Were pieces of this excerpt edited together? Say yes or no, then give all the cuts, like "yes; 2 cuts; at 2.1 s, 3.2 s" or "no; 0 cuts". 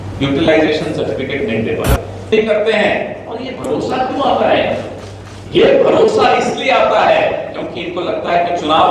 yes; 1 cut; at 2.3 s